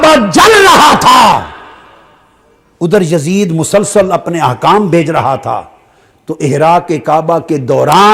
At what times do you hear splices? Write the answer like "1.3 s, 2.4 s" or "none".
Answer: none